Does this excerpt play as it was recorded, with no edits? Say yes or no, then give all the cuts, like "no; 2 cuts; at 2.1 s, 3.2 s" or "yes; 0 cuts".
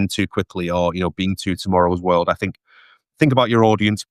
yes; 0 cuts